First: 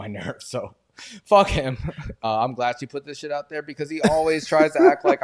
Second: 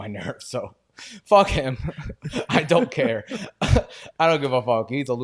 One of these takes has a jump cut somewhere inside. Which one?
first; 1 cut; at 2.1 s

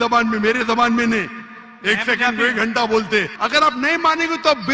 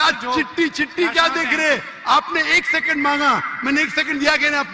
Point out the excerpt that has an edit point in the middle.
first; 1 cut; at 3.4 s

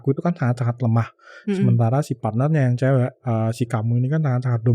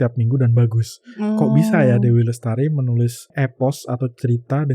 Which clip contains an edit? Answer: second; 1 cut; at 3.3 s

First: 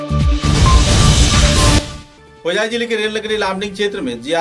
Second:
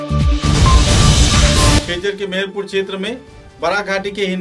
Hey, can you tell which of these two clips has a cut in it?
second; 1 cut; at 1.8 s

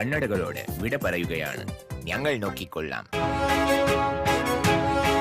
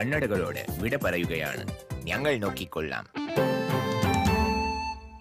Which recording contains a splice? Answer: first; 1 cut; at 3.0 s

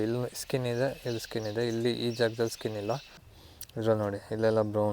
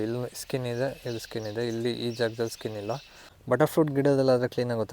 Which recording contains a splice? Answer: first; 1 cut; at 3.3 s

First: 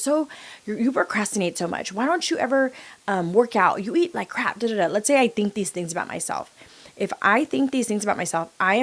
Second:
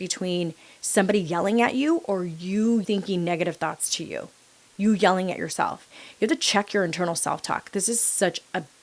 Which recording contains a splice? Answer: second; 1 cut; at 2.8 s

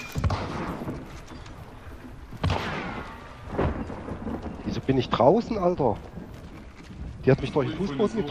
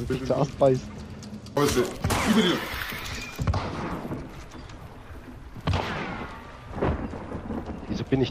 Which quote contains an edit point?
second; 1 cut; at 1.6 s

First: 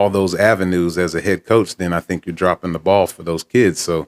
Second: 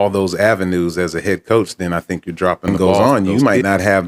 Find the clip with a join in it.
second; 1 cut; at 3.2 s

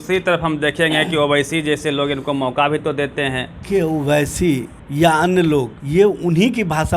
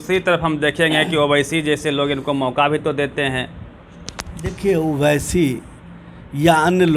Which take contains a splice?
first; 3 cuts; at 3.6 s, 4.8 s, 5.8 s

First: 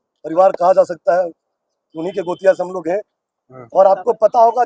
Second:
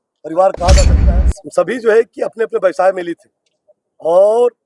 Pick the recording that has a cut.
second; 1 cut; at 1.0 s

